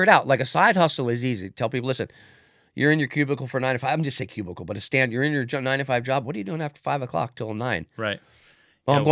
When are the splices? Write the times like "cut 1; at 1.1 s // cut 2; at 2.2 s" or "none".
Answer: none